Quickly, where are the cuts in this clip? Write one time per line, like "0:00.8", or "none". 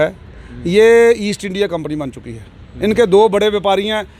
none